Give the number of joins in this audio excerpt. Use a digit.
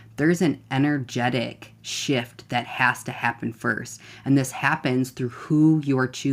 0